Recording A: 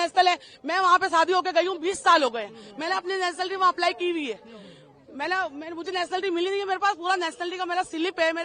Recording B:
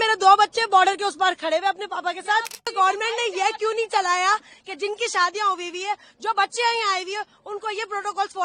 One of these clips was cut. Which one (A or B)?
B